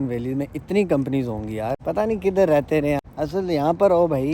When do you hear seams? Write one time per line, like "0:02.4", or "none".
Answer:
0:01.8
0:03.0